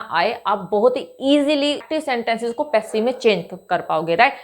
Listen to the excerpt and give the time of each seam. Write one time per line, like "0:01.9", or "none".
0:01.8